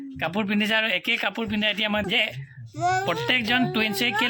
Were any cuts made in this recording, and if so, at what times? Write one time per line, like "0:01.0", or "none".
0:02.0